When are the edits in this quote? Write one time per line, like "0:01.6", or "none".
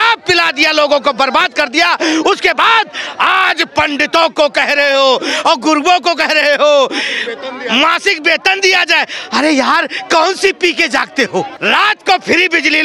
0:11.5